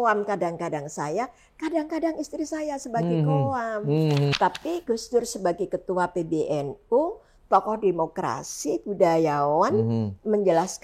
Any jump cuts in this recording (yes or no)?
yes